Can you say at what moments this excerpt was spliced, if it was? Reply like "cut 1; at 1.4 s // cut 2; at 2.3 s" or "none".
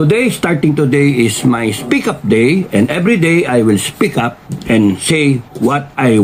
none